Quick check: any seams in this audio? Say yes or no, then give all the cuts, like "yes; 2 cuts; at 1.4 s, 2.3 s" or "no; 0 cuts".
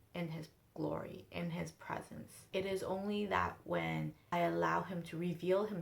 yes; 2 cuts; at 2.4 s, 4.2 s